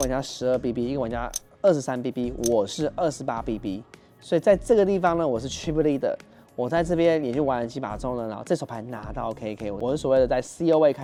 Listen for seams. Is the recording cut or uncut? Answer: uncut